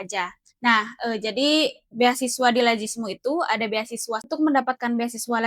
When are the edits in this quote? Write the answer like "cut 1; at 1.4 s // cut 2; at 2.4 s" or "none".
cut 1; at 4.3 s